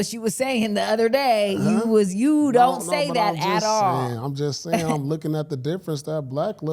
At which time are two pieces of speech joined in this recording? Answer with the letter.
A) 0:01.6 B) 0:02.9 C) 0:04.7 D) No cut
D